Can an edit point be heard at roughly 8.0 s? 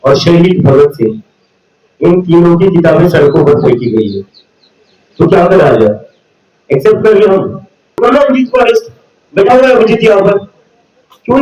yes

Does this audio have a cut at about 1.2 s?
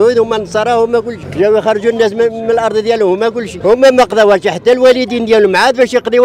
yes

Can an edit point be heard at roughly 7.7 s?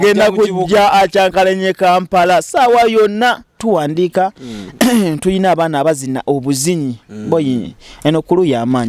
no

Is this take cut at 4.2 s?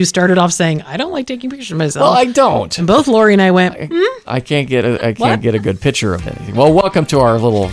no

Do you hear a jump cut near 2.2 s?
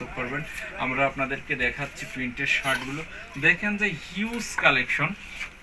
no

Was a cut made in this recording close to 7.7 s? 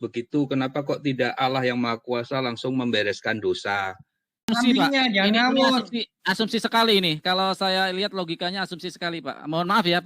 no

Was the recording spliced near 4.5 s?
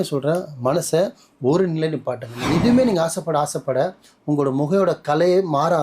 no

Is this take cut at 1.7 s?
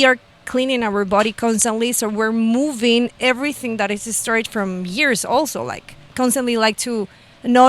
no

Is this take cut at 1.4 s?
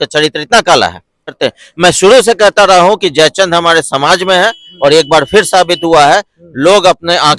yes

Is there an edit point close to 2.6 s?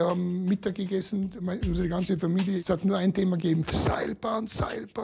yes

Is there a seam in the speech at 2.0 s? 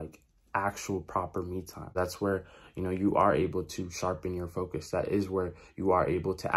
yes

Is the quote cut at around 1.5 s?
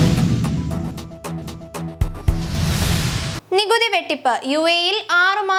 no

